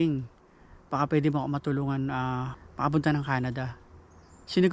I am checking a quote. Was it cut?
yes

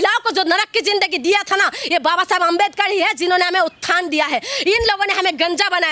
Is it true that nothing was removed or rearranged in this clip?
yes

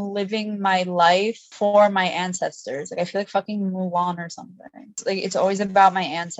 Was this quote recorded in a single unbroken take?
no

